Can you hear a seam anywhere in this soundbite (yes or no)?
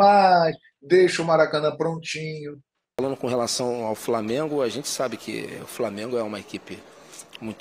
yes